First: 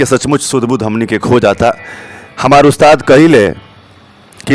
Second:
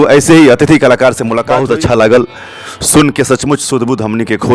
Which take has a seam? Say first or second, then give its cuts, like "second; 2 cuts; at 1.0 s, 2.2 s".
second; 1 cut; at 1.3 s